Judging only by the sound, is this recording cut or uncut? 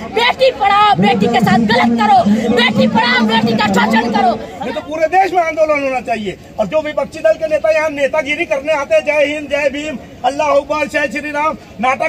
cut